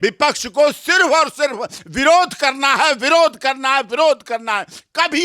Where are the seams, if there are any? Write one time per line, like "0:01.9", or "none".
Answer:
none